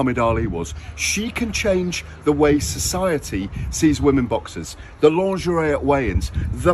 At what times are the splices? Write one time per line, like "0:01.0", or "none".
0:05.0